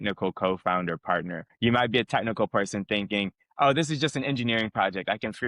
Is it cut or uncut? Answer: cut